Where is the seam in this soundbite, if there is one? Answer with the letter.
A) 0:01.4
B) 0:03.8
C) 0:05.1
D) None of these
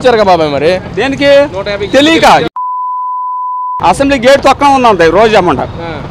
B